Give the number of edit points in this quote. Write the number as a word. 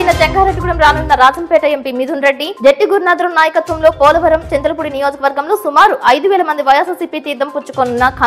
zero